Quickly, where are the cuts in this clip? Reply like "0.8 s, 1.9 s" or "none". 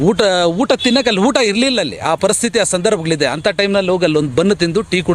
none